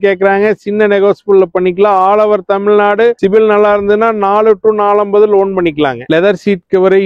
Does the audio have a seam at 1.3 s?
no; 1 cut; at 6.0 s

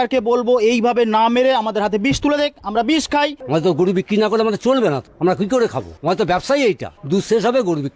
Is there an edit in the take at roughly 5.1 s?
yes; 4 cuts; at 3.4 s, 5.1 s, 5.9 s, 6.9 s

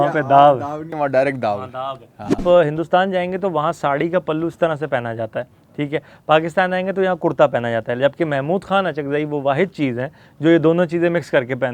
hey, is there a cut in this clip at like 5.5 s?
no; 1 cut; at 2.4 s

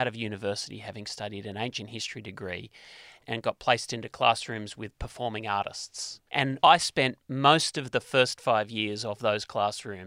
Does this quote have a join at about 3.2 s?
yes; 2 cuts; at 3.2 s, 6.4 s

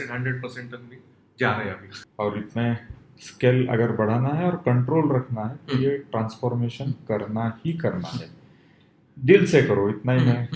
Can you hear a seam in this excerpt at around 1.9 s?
yes; 1 cut; at 1.9 s

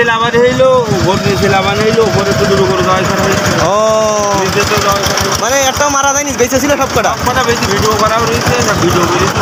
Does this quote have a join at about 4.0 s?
no; 0 cuts

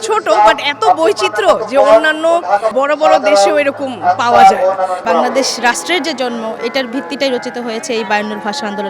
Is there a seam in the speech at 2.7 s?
yes; 2 cuts; at 2.7 s, 5.0 s

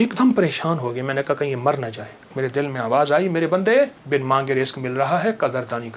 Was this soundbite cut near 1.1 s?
no; 2 cuts; at 2.3 s, 4.0 s

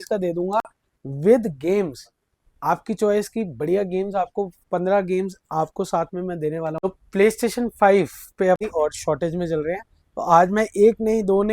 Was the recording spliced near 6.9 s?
yes; 2 cuts; at 6.9 s, 8.6 s

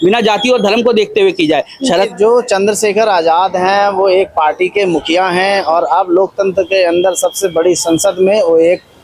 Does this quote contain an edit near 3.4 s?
no; 1 cut; at 2.1 s

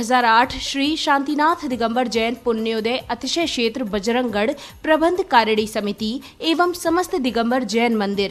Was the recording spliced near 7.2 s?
no; 0 cuts

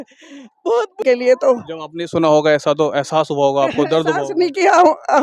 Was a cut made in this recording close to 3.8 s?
no; 1 cut; at 1.0 s

